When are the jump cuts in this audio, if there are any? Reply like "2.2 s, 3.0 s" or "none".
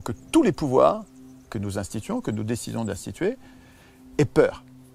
none